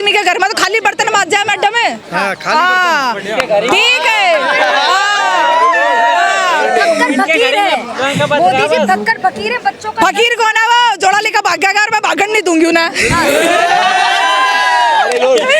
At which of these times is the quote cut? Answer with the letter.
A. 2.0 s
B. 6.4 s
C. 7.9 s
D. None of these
D